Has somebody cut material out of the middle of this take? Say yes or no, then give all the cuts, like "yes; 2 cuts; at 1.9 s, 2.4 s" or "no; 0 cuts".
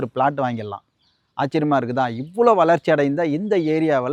no; 0 cuts